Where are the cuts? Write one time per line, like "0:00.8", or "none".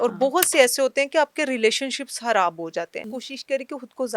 0:03.1